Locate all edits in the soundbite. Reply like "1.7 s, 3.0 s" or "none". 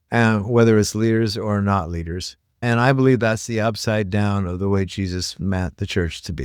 2.6 s